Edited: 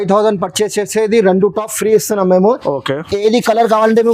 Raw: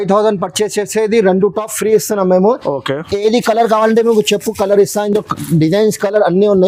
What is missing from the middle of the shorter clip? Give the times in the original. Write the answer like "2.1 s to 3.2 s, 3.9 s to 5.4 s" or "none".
none